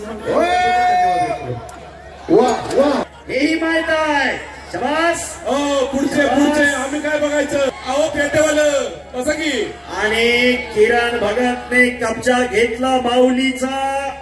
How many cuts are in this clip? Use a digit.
2